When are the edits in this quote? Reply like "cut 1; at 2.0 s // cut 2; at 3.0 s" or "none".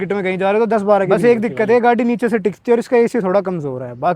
cut 1; at 1.1 s